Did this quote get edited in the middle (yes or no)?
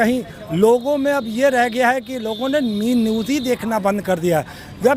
no